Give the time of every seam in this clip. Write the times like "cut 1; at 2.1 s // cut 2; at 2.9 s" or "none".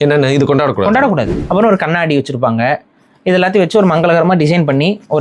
cut 1; at 1.4 s